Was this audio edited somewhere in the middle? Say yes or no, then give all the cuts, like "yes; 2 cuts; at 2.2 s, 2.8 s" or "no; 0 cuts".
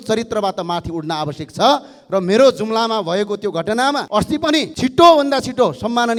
no; 0 cuts